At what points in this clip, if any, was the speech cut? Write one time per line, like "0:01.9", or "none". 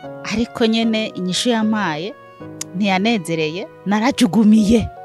0:03.7